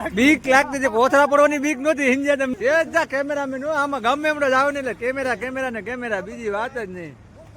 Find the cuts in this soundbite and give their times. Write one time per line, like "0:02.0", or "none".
0:02.5

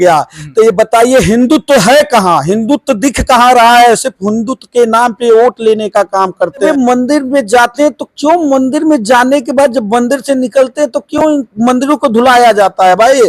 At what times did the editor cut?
0:06.6

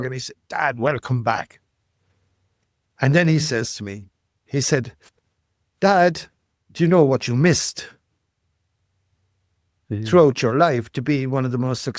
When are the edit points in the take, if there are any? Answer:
none

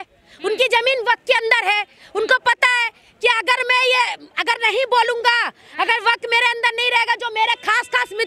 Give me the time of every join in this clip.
none

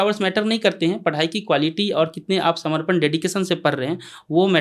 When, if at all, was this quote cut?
none

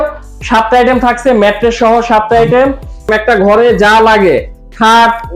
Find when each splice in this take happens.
0:03.1

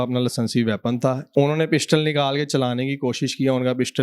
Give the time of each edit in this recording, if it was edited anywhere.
0:01.2

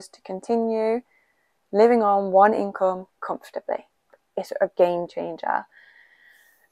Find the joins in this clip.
0:04.1

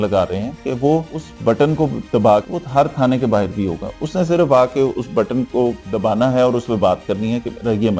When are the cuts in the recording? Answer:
none

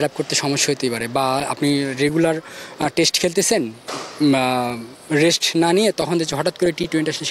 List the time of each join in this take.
none

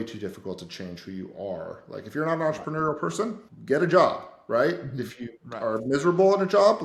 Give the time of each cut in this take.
none

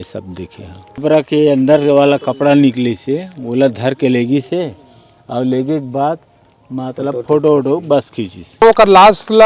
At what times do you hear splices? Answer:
0:01.0
0:08.6

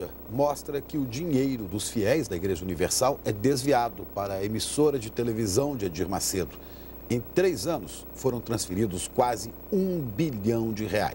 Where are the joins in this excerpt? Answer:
none

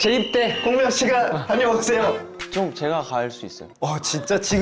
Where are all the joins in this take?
none

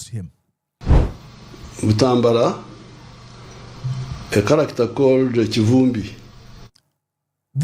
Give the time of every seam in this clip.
0:01.1

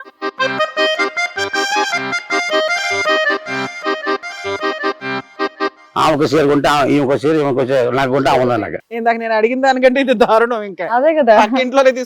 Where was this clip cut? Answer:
0:05.8

